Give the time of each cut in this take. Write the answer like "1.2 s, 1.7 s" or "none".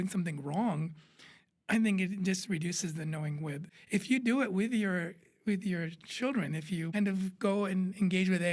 3.7 s, 6.9 s